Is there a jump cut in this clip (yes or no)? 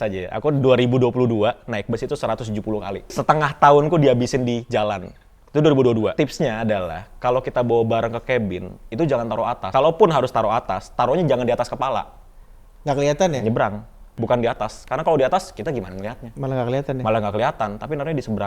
yes